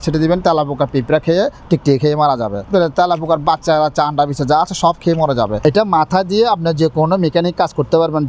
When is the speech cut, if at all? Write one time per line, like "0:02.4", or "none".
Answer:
0:02.6
0:05.6